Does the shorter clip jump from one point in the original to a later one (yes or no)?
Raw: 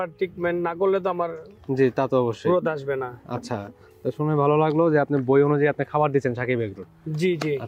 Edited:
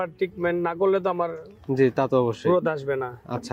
no